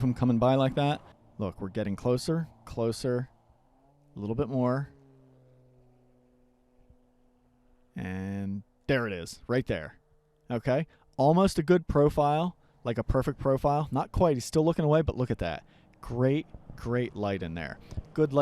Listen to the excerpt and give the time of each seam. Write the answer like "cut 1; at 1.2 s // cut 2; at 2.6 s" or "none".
cut 1; at 1.1 s